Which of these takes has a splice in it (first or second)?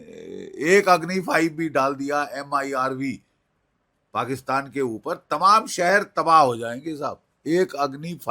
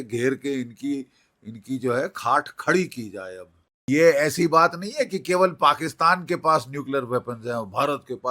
second